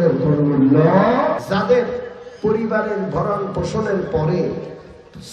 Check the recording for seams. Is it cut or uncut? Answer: cut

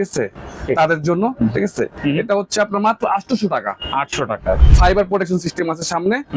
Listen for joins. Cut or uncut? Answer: cut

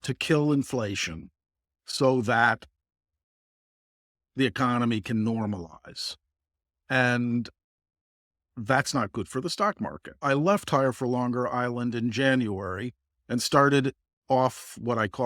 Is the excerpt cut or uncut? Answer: cut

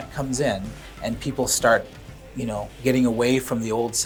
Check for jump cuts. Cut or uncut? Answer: uncut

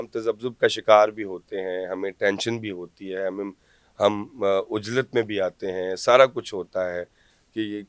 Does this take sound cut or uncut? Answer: uncut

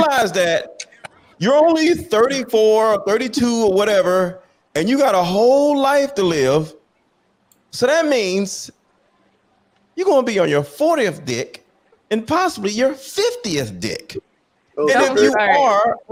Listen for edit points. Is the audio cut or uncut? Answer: uncut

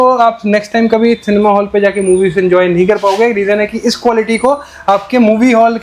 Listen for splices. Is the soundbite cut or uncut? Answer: uncut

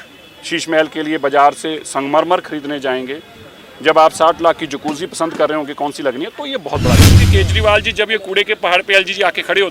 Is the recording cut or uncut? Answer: cut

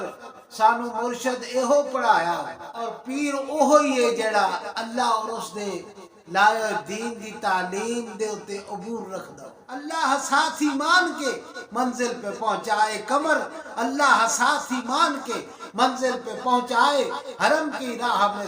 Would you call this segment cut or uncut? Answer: cut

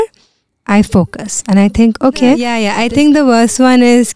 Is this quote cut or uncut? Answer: cut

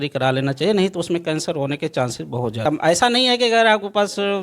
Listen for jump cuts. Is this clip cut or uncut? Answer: cut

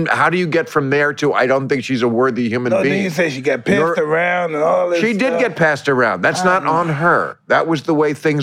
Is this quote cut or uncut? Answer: uncut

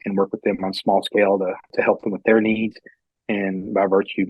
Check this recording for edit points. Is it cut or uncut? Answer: cut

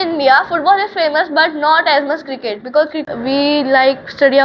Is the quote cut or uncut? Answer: cut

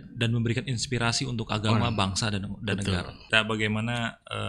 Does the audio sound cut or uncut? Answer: cut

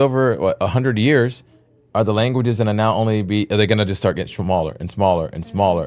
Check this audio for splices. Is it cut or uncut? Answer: uncut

